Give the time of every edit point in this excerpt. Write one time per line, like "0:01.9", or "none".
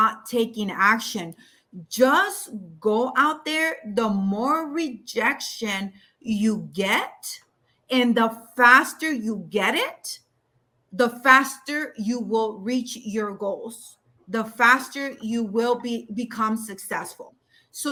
none